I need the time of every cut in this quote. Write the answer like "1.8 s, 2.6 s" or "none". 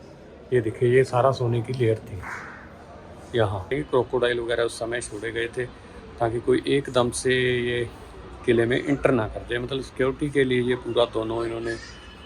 3.7 s